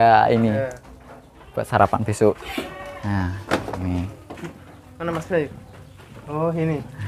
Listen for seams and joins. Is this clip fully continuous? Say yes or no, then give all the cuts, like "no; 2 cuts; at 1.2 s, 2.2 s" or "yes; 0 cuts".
yes; 0 cuts